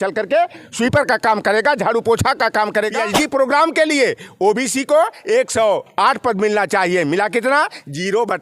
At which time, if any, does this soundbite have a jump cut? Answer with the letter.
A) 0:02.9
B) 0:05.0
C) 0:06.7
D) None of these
A